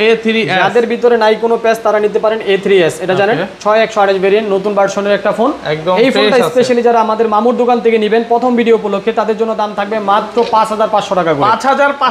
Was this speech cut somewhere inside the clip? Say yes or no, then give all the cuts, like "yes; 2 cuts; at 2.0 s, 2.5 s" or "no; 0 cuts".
no; 0 cuts